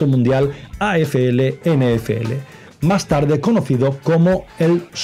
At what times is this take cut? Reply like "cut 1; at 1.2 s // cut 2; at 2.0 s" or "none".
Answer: none